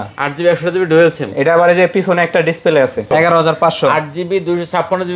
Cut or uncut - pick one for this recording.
cut